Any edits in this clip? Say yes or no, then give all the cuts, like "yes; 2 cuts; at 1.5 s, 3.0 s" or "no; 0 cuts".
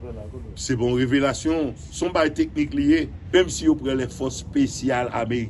yes; 1 cut; at 3.2 s